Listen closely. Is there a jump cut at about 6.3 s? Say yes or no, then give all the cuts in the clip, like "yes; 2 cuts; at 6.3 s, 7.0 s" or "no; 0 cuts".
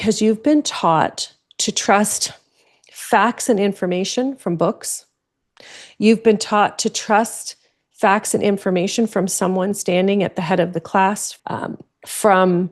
no; 1 cut; at 11.3 s